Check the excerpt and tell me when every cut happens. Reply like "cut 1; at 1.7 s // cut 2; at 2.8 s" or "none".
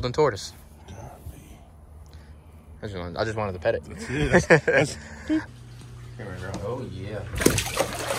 cut 1; at 5.4 s